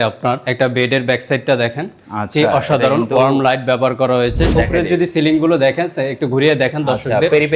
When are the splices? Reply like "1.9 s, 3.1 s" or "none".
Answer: 4.5 s

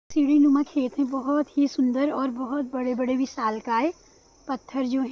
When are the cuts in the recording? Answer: none

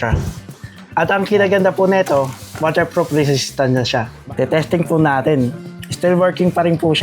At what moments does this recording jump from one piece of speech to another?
4.1 s

